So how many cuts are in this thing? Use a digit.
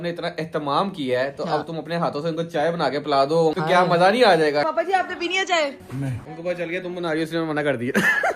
3